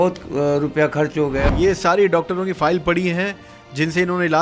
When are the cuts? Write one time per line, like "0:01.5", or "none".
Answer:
0:01.4